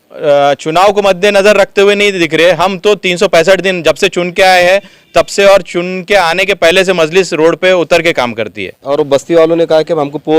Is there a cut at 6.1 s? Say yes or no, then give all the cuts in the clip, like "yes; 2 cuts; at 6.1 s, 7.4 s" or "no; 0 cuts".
no; 1 cut; at 8.8 s